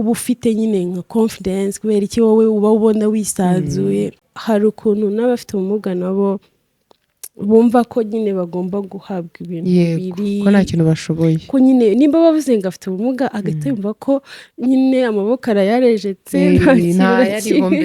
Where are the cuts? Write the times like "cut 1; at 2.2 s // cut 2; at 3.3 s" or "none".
cut 1; at 4.3 s